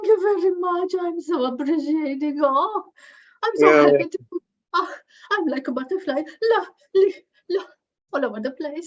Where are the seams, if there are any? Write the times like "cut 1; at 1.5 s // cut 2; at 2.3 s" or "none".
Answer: none